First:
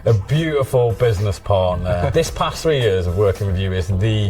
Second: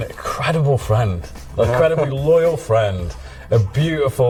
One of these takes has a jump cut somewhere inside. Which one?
first; 1 cut; at 2.1 s

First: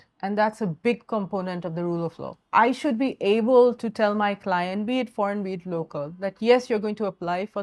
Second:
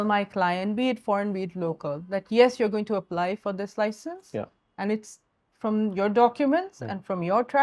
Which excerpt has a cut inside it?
first; 1 cut; at 2.3 s

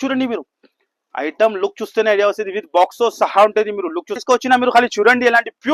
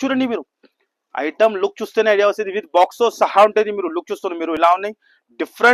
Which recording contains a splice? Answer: first; 1 cut; at 4.2 s

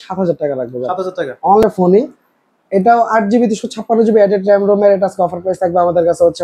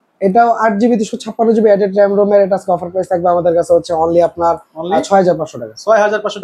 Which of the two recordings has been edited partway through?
first; 1 cut; at 1.6 s

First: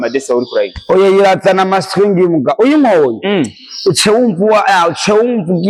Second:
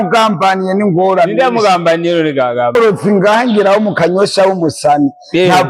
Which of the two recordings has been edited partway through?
second; 1 cut; at 2.7 s

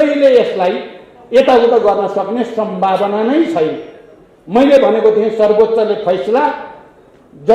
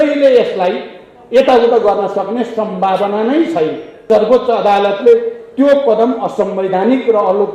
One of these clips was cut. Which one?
second; 1 cut; at 4.0 s

